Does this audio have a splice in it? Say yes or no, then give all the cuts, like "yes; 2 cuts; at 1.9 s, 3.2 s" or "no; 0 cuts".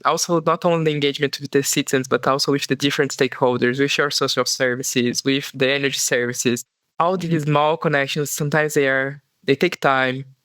yes; 1 cut; at 6.8 s